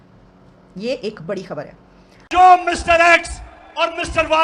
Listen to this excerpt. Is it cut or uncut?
cut